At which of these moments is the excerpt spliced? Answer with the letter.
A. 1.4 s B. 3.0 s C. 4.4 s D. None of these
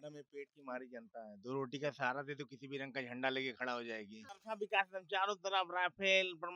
C